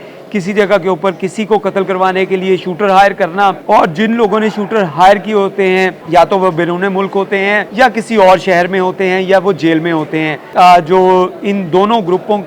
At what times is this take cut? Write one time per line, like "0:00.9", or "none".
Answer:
0:03.6
0:06.0
0:07.7
0:10.4